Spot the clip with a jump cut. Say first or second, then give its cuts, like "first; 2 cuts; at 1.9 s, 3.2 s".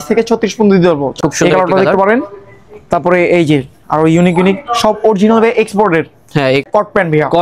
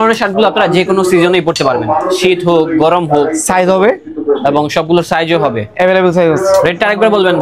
first; 2 cuts; at 1.2 s, 6.6 s